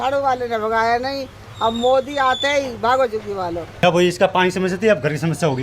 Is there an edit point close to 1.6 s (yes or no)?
no